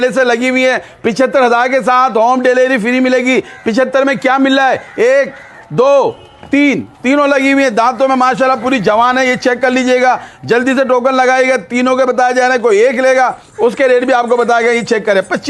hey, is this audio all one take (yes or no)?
yes